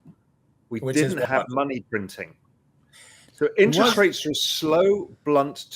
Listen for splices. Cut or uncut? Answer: uncut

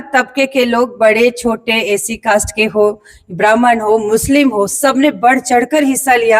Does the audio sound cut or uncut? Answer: uncut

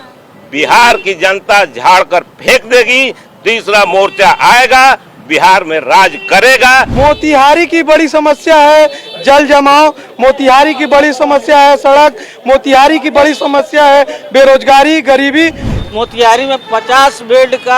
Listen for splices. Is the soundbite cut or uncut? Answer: cut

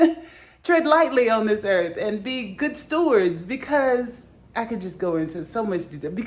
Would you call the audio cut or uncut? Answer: uncut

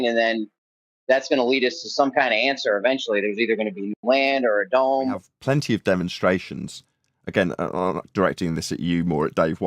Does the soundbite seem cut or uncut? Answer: cut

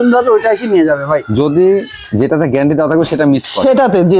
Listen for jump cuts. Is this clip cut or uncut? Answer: uncut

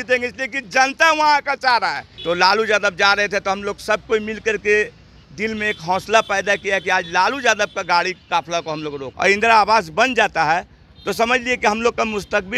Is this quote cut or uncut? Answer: cut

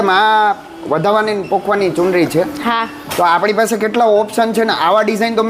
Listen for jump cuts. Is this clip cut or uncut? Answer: uncut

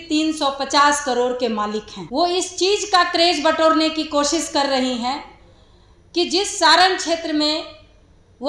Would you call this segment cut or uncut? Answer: uncut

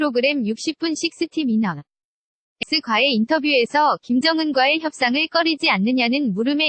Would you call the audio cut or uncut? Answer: cut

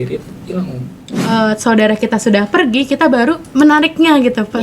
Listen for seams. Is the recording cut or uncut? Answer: cut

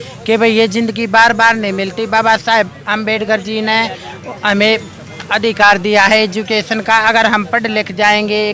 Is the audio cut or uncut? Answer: uncut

